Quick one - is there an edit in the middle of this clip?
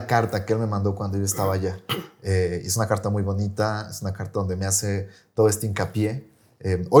no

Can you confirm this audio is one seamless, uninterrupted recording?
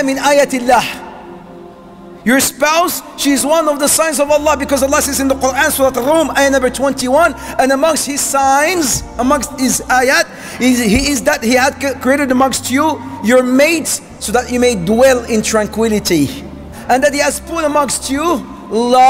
no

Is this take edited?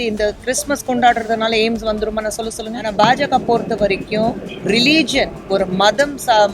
yes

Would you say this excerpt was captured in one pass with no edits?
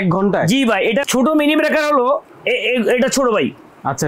no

